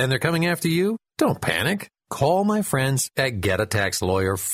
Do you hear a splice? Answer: no; 0 cuts

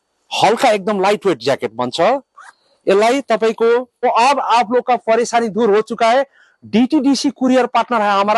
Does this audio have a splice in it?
yes; 1 cut; at 4.0 s

